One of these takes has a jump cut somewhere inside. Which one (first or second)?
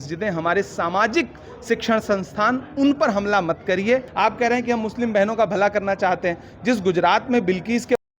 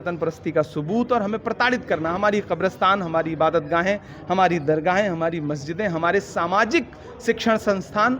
first